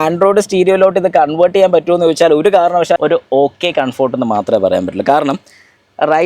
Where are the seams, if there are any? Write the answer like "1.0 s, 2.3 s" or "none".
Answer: 3.0 s